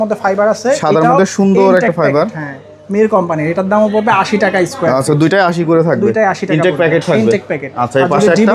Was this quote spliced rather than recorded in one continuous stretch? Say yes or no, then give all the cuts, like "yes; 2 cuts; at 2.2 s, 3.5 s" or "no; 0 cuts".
no; 0 cuts